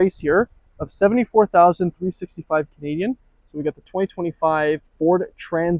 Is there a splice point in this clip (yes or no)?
no